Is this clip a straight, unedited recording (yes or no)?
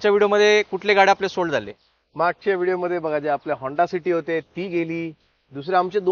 yes